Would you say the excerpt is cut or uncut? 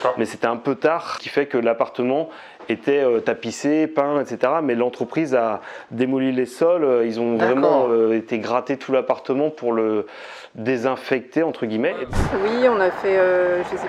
cut